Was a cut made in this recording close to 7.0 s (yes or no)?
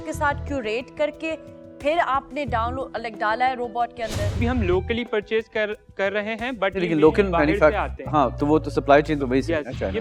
no